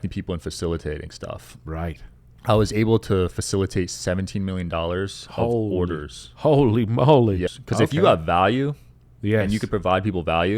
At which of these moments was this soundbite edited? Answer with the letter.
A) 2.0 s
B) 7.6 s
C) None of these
B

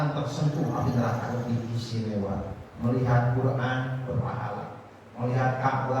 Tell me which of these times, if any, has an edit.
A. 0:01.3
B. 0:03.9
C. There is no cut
A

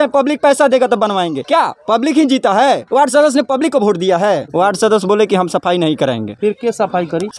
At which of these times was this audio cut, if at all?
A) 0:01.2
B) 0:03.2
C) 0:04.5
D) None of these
C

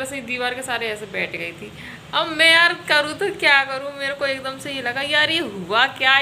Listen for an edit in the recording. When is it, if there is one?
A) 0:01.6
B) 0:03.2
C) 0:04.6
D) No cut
D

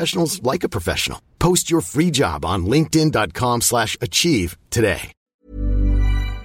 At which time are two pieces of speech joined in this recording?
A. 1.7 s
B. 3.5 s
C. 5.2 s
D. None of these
C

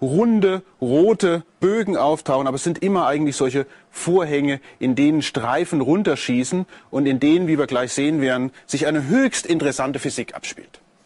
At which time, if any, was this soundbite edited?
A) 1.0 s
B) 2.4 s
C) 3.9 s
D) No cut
D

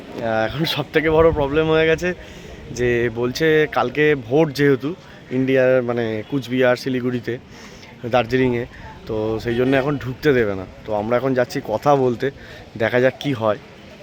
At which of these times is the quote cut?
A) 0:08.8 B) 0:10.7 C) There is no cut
C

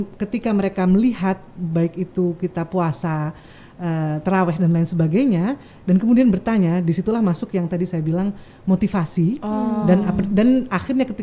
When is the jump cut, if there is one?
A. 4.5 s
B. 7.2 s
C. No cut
C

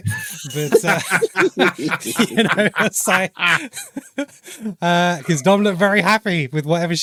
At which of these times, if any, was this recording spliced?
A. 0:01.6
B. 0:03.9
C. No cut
C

